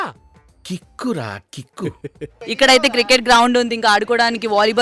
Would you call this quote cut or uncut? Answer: cut